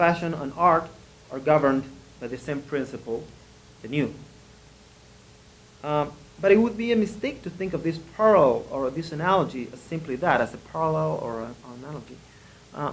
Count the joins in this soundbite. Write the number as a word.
one